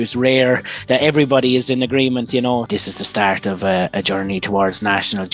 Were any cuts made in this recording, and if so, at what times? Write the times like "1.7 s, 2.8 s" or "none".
2.7 s